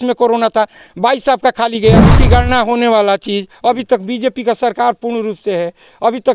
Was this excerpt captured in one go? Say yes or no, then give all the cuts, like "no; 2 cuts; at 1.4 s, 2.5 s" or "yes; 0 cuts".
no; 1 cut; at 2.1 s